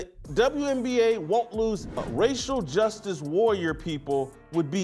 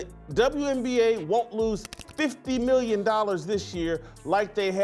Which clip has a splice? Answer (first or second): first